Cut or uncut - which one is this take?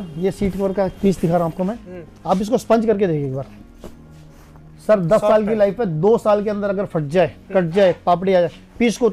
uncut